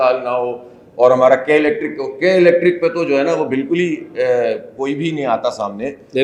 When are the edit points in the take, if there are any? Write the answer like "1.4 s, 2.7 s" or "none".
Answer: none